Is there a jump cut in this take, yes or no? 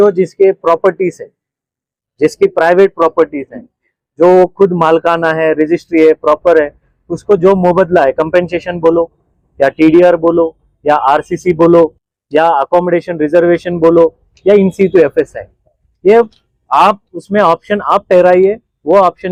no